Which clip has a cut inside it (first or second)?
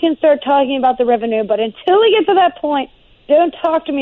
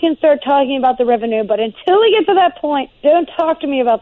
second